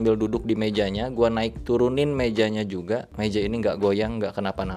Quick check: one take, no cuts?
no; 1 cut; at 3.1 s

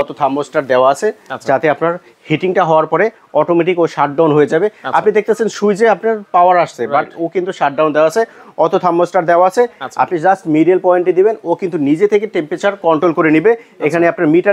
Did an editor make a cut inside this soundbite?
no; 0 cuts

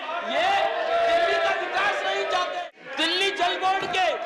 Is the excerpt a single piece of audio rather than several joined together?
no; 1 cut; at 2.5 s

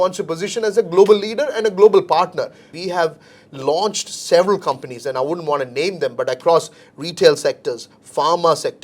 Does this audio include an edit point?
yes; 1 cut; at 2.8 s

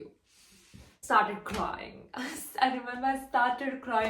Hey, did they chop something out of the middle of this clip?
yes; 1 cut; at 1.0 s

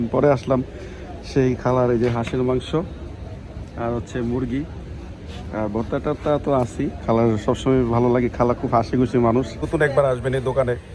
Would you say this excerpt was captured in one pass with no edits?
no; 1 cut; at 9.6 s

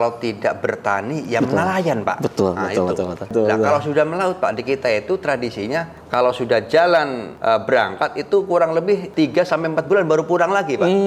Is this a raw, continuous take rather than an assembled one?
no; 4 cuts; at 3.3 s, 6.0 s, 7.2 s, 9.1 s

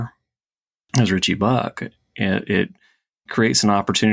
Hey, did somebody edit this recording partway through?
no; 0 cuts

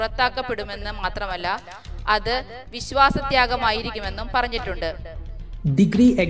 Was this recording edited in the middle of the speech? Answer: no; 0 cuts

